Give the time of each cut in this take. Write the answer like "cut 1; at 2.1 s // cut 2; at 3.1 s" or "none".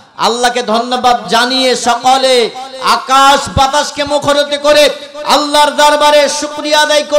cut 1; at 1.2 s